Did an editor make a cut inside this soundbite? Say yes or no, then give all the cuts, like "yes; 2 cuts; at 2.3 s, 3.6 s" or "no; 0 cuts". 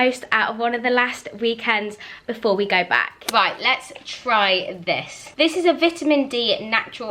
no; 0 cuts